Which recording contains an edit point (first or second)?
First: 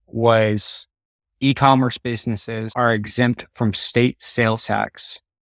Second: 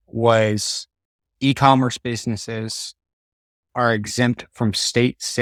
first